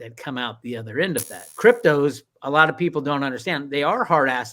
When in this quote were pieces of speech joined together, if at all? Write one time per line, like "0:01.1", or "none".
0:01.4